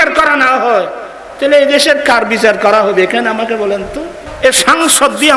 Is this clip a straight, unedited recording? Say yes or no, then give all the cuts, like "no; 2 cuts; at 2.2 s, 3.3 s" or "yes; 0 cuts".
no; 1 cut; at 4.3 s